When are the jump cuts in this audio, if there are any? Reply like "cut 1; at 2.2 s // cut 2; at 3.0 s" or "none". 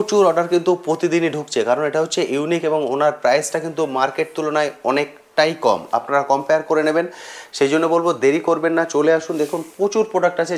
none